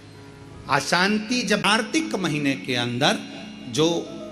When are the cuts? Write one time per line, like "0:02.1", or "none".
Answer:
0:01.6

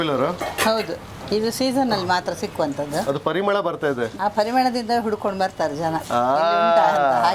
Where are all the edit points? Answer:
0:03.0
0:04.1

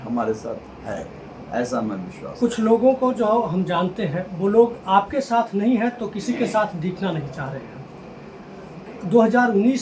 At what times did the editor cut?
none

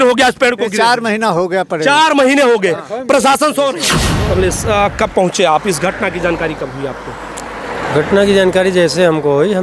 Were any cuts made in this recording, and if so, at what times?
0:04.0

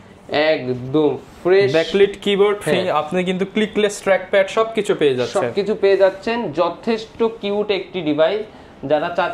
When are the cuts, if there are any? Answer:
none

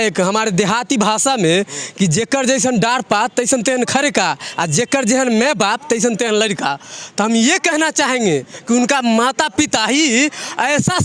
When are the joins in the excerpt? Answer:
none

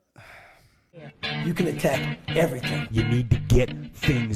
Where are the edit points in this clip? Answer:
0:01.2

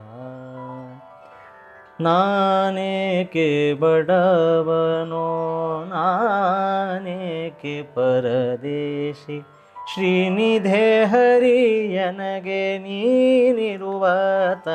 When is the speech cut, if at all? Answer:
none

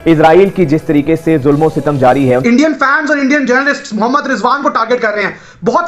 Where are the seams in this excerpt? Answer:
0:02.7

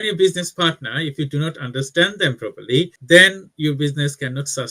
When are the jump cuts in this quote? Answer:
none

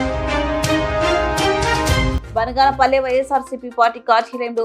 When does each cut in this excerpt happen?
0:02.1

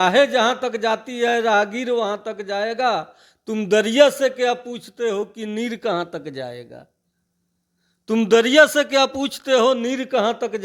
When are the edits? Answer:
none

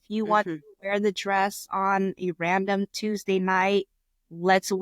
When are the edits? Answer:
none

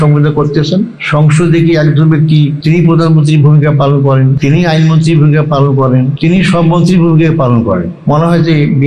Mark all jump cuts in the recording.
0:01.0
0:02.6
0:04.4
0:06.1
0:07.9

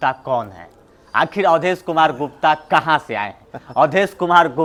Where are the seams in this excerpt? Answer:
none

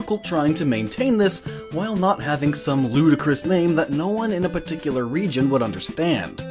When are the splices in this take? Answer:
0:02.2

